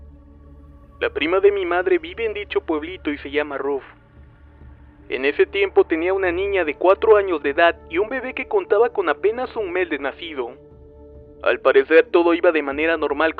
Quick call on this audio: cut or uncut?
uncut